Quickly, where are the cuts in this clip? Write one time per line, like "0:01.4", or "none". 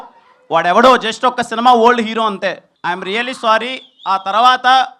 0:02.7